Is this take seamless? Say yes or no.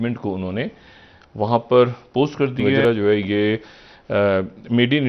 no